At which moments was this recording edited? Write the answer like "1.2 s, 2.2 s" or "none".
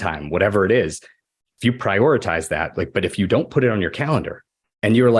none